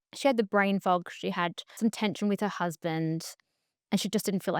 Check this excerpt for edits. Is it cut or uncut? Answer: cut